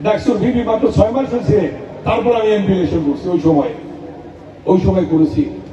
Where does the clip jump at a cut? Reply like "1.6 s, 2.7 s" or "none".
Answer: none